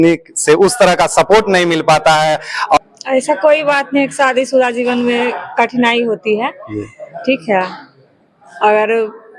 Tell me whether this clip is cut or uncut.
cut